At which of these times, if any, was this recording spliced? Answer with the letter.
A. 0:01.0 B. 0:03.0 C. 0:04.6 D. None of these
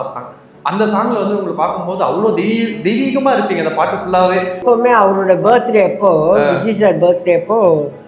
C